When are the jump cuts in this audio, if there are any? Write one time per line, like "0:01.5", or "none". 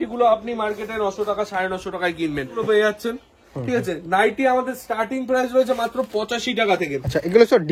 0:02.5